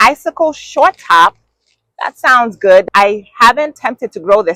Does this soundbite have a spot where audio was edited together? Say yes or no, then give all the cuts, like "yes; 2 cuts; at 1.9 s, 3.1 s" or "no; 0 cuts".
no; 0 cuts